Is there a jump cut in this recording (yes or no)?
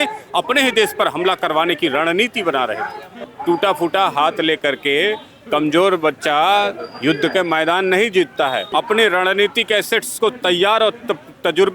yes